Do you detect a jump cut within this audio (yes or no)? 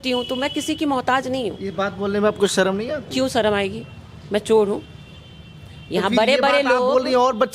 no